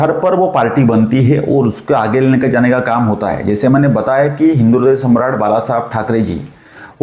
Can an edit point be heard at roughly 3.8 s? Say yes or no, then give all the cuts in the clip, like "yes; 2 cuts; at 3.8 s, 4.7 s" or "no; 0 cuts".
no; 0 cuts